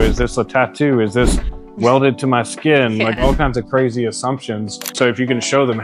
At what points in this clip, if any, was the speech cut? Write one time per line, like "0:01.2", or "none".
0:04.9

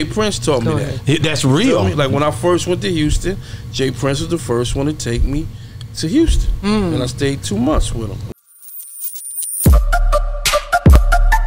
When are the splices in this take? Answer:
0:08.2

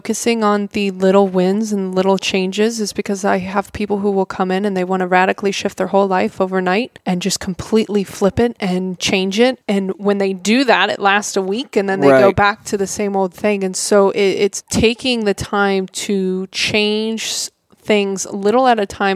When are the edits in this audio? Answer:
0:07.0
0:09.6
0:14.6

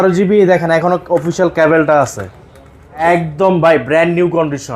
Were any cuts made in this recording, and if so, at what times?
0:03.0

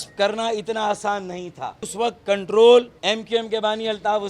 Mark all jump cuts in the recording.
0:01.9
0:02.9

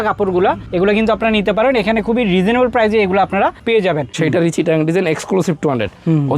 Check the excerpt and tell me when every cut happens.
0:04.1

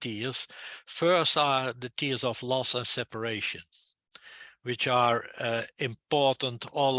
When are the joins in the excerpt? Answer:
none

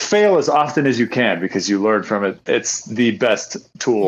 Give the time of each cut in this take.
none

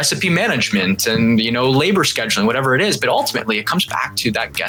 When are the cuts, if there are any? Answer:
none

